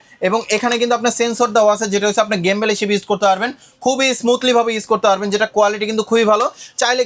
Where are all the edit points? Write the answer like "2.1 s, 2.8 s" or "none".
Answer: none